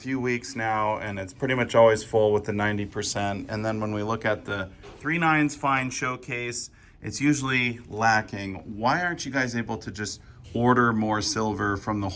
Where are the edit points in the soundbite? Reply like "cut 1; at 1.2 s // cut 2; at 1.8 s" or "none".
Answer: none